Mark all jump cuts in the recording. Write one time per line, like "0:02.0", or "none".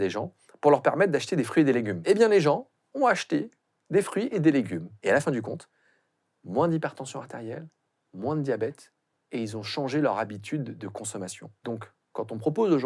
0:01.9
0:04.8
0:11.4